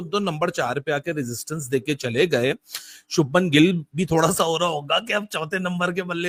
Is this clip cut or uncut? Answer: uncut